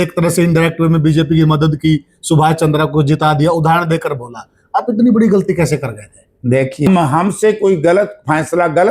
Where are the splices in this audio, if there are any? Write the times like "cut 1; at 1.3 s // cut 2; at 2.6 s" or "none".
cut 1; at 6.9 s